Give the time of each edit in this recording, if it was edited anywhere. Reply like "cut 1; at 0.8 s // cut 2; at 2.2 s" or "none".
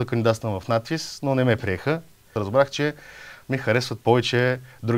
cut 1; at 2.3 s